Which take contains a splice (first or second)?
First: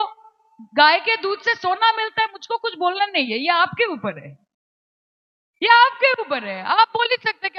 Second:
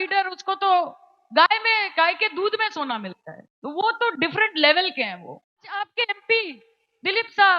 second